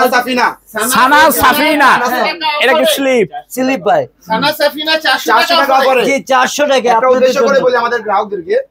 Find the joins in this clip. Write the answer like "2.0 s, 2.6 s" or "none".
none